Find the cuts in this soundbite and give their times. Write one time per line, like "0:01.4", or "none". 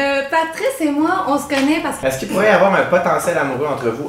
0:02.0